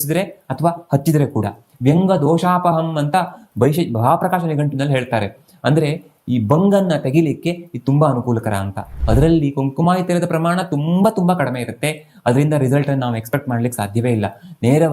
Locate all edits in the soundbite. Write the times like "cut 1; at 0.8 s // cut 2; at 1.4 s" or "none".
cut 1; at 8.9 s